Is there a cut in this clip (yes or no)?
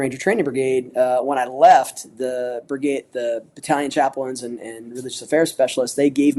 no